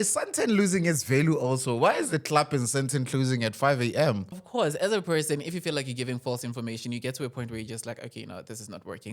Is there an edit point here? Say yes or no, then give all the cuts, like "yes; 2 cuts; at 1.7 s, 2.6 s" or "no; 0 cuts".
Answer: yes; 1 cut; at 4.4 s